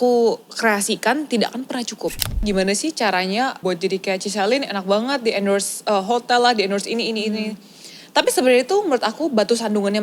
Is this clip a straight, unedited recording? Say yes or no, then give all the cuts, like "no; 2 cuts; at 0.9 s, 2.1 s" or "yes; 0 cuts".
no; 2 cuts; at 2.4 s, 3.6 s